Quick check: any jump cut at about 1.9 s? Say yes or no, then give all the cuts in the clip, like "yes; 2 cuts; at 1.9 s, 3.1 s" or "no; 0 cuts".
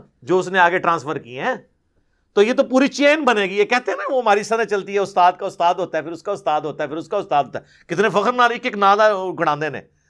no; 0 cuts